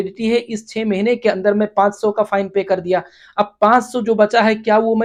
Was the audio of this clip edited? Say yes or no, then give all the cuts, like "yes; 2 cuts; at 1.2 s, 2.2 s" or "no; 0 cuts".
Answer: no; 0 cuts